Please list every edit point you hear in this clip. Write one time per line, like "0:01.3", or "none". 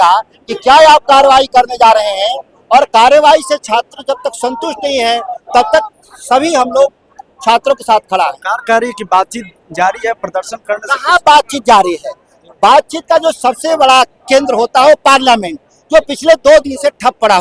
none